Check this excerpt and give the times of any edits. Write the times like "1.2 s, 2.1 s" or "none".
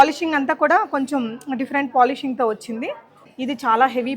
3.2 s